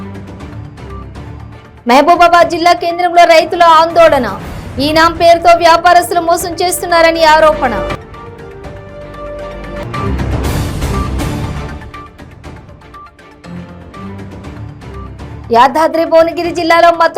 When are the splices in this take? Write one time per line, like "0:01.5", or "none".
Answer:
none

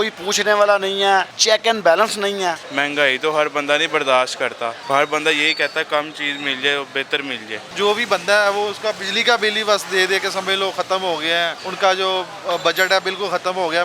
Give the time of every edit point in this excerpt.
0:01.3
0:02.7
0:04.8
0:07.7
0:11.6

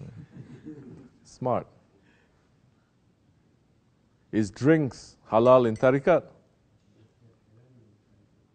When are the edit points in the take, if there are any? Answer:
0:04.8

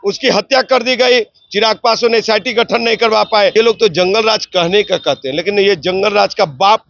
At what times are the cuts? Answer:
0:03.5

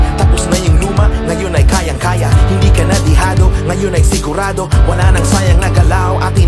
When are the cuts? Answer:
none

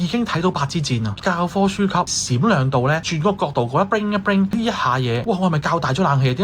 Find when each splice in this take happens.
0:01.2

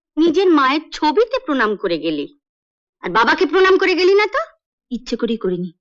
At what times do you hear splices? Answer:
none

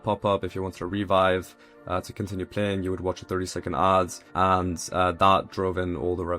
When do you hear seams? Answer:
0:04.2

